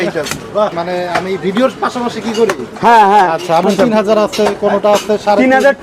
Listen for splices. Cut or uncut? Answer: cut